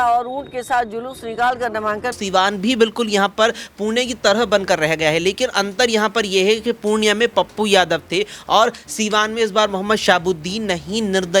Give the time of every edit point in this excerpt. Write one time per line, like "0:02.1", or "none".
0:02.2